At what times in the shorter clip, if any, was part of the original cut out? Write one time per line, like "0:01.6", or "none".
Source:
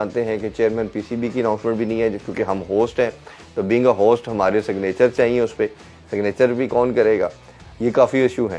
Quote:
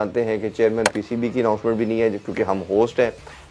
none

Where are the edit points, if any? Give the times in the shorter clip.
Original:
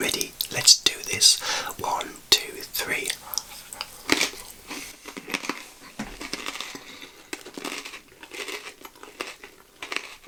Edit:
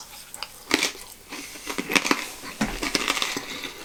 none

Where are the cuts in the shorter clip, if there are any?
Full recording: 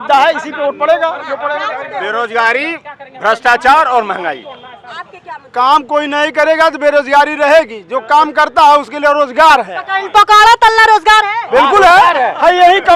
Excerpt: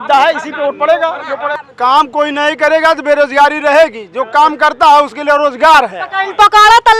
0:01.6

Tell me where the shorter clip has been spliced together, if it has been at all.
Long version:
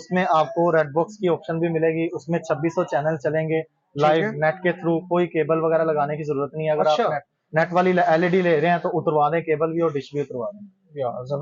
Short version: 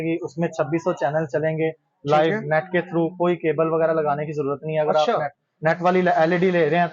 none

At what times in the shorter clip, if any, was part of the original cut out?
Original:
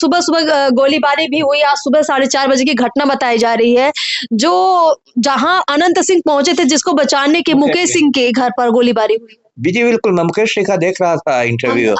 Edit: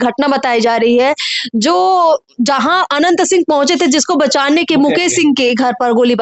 none

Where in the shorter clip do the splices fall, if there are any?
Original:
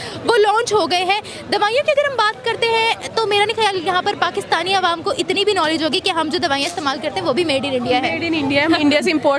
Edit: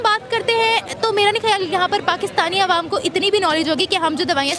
none

